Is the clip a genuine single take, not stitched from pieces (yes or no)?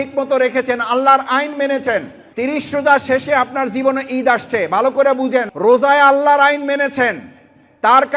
no